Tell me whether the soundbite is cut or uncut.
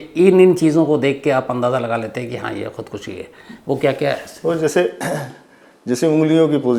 uncut